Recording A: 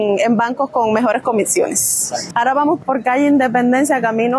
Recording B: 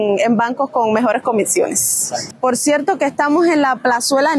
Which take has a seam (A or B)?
A